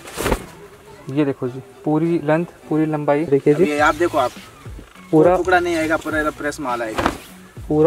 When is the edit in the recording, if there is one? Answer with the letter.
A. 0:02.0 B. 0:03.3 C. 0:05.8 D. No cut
B